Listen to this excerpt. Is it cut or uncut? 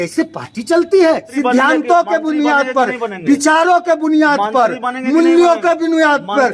cut